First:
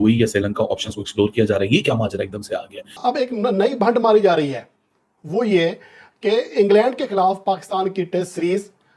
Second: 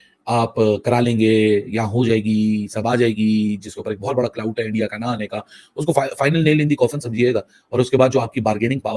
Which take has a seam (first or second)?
first